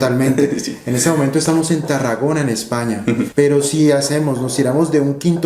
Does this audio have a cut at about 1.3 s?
no; 1 cut; at 3.3 s

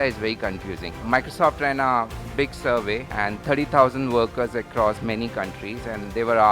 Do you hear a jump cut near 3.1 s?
yes; 1 cut; at 3.1 s

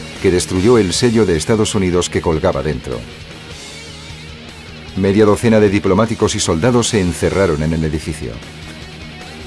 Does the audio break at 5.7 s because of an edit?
yes; 1 cut; at 5.7 s

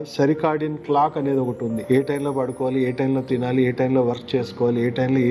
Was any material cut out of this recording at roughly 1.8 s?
yes; 1 cut; at 1.8 s

